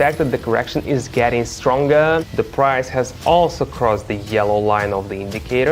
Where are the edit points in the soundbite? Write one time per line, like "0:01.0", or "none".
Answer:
0:02.3